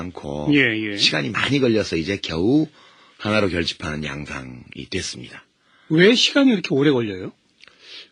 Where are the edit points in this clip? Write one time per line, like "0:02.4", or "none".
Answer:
none